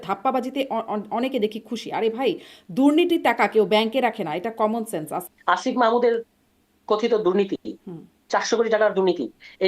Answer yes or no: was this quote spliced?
yes